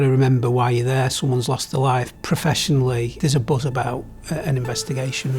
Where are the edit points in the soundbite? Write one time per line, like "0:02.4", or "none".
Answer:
0:02.1
0:03.1